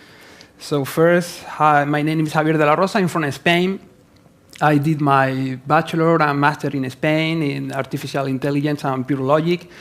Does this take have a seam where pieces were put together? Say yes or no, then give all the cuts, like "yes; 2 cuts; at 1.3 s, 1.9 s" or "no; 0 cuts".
yes; 1 cut; at 1.4 s